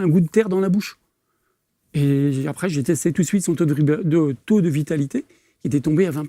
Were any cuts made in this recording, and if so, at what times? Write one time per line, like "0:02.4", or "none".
none

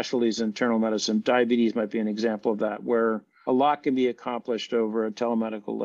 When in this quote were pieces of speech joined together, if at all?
0:03.3

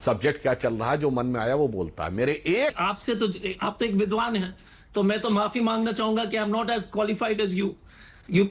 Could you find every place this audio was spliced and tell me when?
0:02.1
0:02.8

